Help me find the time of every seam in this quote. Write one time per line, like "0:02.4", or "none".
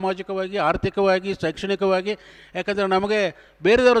none